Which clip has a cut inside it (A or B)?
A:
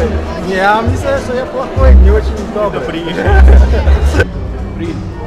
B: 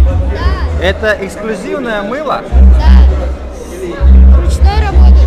A